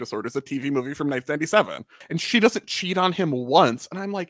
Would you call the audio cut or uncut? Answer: cut